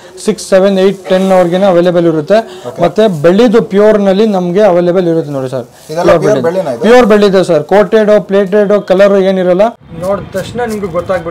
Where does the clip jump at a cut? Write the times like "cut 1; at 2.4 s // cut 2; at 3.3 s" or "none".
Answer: cut 1; at 9.9 s